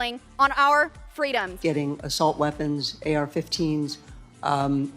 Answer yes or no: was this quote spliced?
yes